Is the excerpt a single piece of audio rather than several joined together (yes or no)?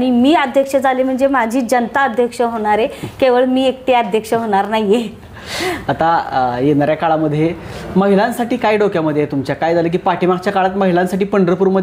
yes